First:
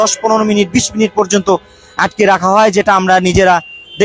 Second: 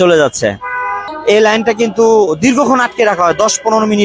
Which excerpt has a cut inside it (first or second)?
second